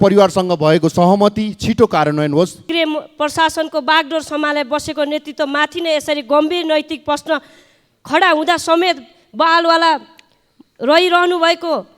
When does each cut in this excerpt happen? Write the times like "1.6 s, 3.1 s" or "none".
2.7 s

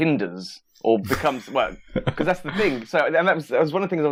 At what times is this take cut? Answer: none

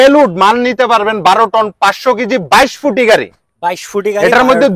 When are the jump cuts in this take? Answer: none

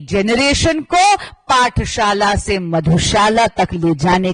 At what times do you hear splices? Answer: none

